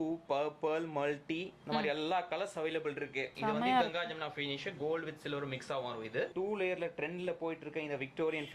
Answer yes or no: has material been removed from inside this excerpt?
yes